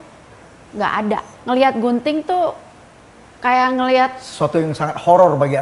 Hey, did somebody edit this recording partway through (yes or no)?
yes